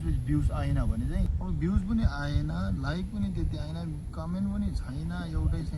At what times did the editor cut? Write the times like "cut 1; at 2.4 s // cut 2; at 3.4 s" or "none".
cut 1; at 1.3 s